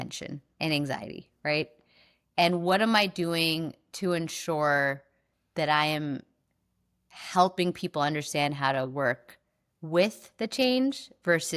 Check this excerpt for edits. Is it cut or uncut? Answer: uncut